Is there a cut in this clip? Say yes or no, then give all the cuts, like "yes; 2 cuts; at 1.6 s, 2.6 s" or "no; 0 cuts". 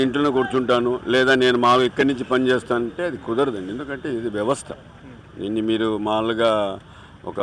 no; 0 cuts